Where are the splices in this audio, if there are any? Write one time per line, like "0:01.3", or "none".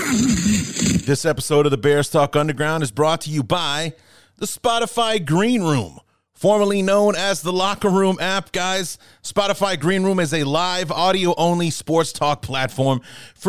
0:01.0